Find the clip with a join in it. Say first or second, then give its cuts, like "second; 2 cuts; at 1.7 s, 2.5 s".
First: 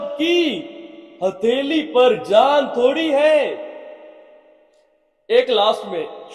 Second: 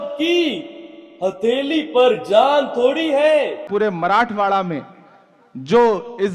second; 1 cut; at 3.7 s